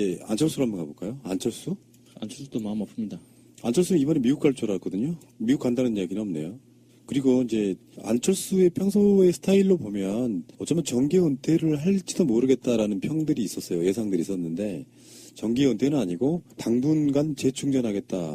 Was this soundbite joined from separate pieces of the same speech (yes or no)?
yes